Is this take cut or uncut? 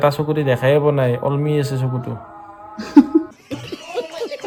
uncut